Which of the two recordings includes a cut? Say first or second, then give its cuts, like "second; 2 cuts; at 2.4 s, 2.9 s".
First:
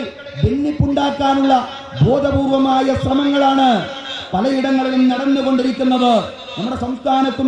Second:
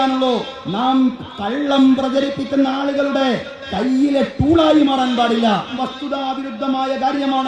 second; 1 cut; at 5.8 s